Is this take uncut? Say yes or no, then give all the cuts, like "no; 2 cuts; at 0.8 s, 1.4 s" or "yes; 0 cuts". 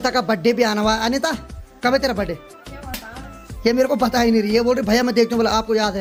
yes; 0 cuts